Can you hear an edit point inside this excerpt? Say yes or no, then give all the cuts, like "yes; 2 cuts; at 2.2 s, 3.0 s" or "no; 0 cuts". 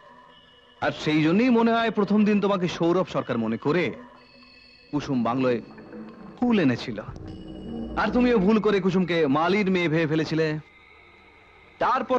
no; 0 cuts